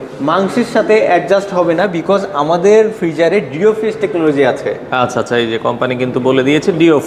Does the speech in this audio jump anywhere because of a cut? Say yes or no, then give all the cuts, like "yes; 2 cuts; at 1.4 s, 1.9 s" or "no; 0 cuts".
no; 0 cuts